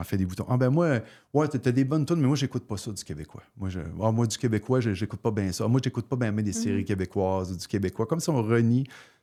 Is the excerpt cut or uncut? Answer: uncut